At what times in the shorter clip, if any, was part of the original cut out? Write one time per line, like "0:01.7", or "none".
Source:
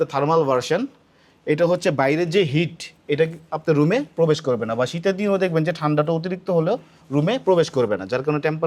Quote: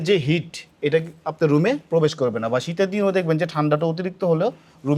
none